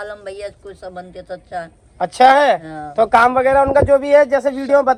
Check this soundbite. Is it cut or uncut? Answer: uncut